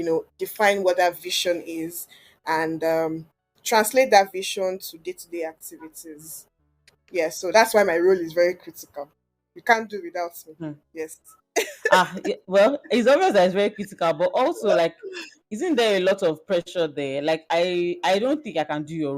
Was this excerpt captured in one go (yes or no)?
yes